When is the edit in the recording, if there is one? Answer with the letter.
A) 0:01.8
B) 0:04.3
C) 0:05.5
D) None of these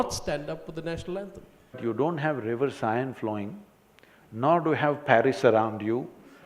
A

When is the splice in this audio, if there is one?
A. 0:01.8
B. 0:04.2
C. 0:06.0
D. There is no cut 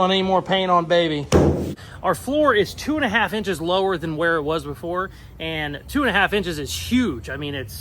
A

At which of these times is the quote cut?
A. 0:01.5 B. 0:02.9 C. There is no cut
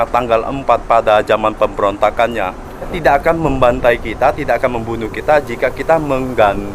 B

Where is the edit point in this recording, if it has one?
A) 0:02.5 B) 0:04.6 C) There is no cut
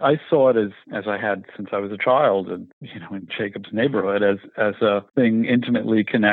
C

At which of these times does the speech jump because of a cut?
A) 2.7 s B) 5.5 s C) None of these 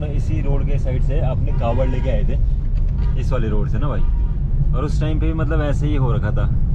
C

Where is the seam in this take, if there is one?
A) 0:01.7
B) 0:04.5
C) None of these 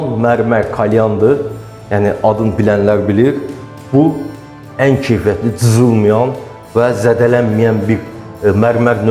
C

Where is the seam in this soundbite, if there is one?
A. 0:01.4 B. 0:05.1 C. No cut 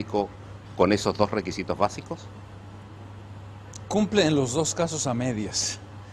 B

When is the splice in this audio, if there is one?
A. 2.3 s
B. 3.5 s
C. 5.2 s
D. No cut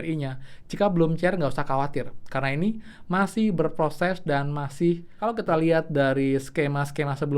C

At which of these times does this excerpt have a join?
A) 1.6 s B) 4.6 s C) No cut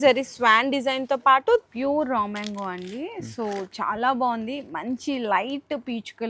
A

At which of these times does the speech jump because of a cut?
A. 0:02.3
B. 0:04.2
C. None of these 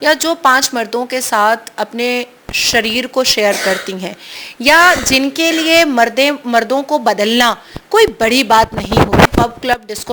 C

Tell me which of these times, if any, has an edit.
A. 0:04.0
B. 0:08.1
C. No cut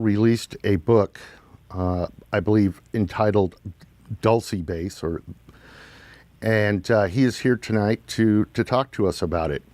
B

